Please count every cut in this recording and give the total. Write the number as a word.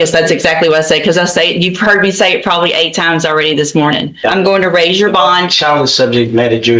one